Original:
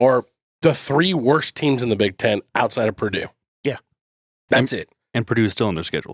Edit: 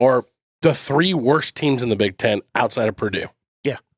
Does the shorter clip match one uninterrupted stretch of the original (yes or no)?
yes